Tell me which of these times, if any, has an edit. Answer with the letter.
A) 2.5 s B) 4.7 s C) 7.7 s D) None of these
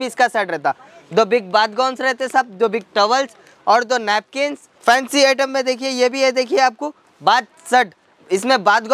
B